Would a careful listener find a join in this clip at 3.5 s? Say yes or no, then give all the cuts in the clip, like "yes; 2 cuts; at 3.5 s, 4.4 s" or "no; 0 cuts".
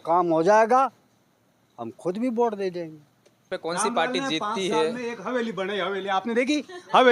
yes; 1 cut; at 3.5 s